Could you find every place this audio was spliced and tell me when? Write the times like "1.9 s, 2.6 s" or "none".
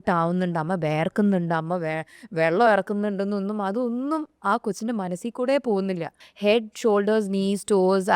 6.2 s

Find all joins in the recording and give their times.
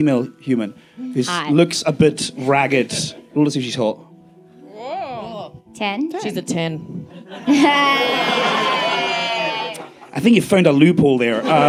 none

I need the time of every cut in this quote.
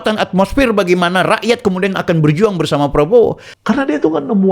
3.5 s

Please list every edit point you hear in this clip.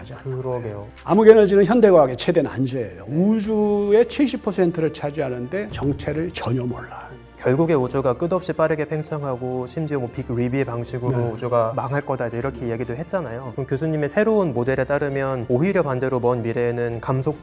0.8 s, 7.3 s

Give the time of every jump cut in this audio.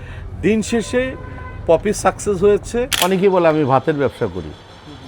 2.9 s

